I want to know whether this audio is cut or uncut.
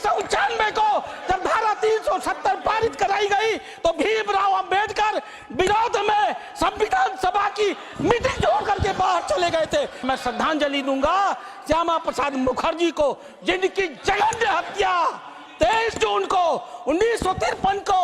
cut